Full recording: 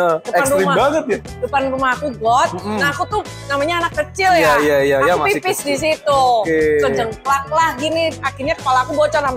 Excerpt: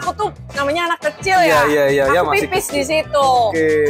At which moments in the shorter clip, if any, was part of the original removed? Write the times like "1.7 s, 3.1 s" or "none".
none